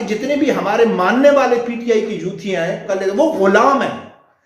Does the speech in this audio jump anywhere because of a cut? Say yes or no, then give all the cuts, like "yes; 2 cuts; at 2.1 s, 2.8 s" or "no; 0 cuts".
yes; 1 cut; at 2.9 s